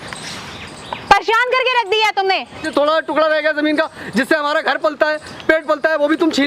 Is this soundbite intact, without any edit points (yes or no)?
no